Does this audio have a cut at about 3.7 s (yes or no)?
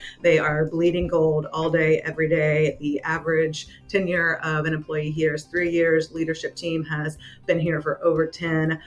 no